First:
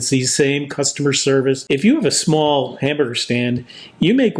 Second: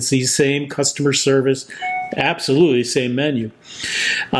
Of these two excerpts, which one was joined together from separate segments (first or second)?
first